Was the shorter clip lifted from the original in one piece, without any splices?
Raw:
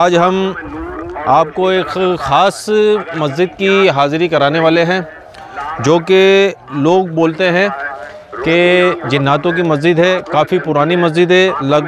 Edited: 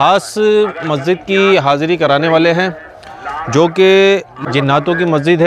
no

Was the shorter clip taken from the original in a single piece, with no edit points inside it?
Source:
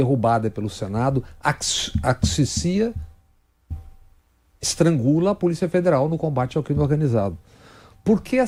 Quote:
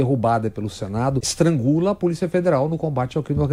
no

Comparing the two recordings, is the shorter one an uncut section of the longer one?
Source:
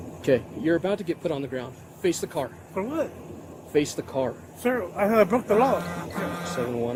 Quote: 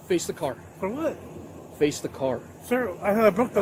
yes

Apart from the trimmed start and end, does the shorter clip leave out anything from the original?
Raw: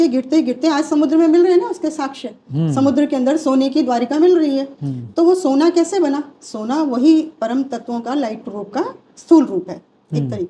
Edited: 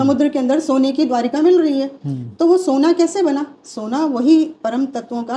no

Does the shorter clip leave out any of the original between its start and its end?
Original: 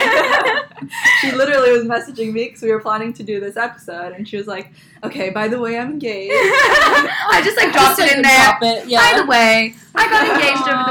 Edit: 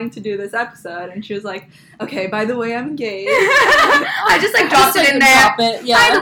no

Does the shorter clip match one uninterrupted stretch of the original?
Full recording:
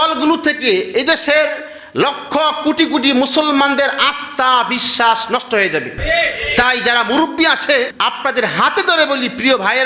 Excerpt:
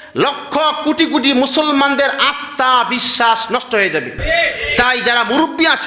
yes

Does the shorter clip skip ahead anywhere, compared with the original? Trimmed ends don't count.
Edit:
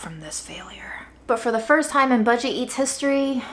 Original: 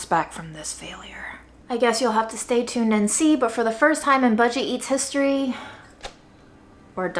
yes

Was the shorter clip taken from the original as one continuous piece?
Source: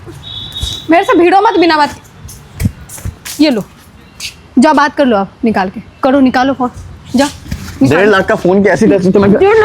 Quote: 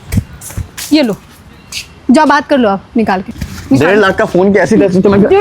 no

